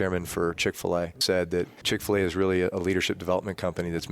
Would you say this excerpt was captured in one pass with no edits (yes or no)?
no